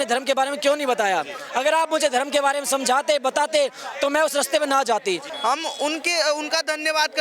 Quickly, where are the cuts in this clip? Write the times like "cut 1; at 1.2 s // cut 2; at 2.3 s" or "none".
cut 1; at 1.4 s // cut 2; at 5.3 s